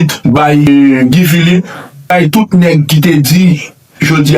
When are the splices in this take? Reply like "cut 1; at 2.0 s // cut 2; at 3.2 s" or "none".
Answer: cut 1; at 0.7 s // cut 2; at 2.1 s